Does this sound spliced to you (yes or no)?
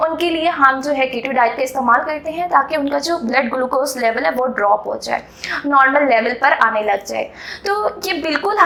no